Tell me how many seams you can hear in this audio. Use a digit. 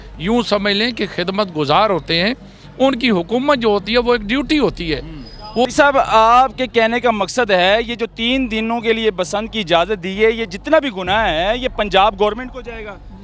1